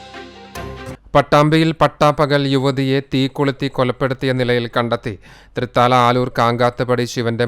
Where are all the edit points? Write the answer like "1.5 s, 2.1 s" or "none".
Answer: 0.9 s